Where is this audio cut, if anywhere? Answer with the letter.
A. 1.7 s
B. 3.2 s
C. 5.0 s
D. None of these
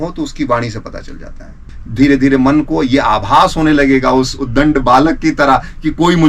A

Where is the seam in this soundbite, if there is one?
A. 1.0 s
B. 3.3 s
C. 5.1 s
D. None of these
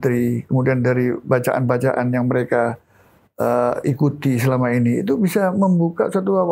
D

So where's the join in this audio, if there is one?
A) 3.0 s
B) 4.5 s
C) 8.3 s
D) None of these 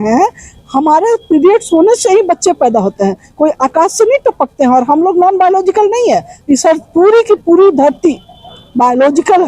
D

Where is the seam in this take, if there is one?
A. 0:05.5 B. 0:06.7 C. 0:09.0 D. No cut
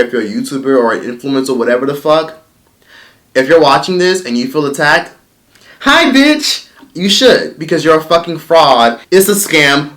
C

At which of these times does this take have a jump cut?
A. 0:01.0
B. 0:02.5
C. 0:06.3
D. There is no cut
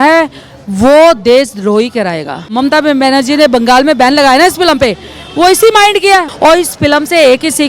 B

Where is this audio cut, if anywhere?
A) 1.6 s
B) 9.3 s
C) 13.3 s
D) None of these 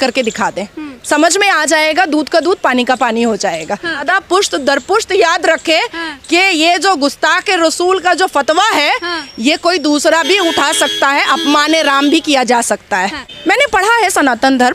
C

